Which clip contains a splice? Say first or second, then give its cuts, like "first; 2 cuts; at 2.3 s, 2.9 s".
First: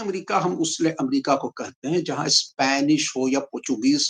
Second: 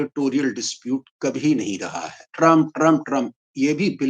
second; 1 cut; at 2.2 s